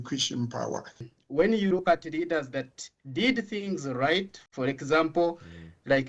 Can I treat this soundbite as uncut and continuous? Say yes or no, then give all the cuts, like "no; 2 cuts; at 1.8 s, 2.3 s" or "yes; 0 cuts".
no; 1 cut; at 1.0 s